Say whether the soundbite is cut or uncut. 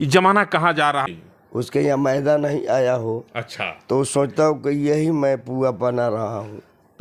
cut